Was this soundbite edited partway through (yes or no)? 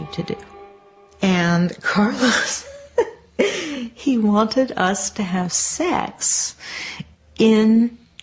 yes